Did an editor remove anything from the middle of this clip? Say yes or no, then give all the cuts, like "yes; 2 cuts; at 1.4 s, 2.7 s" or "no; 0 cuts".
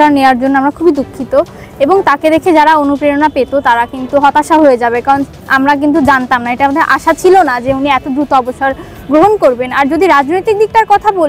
no; 0 cuts